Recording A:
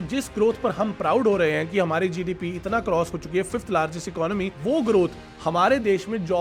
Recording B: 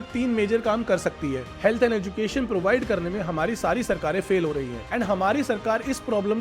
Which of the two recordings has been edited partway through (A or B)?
B